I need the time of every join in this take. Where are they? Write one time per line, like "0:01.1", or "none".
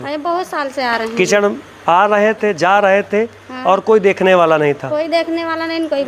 none